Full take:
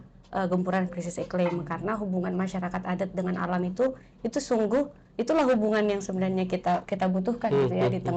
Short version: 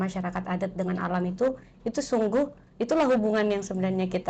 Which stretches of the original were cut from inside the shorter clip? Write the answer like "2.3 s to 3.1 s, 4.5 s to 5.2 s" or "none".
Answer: none